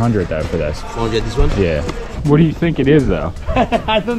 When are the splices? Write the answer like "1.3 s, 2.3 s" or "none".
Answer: 2.1 s